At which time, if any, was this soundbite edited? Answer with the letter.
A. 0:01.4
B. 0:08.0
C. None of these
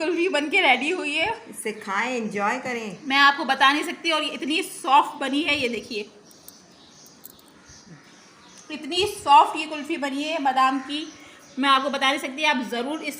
B